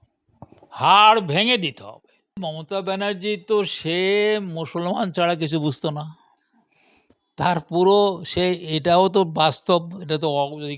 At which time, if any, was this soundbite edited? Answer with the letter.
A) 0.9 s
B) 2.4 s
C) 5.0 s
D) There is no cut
B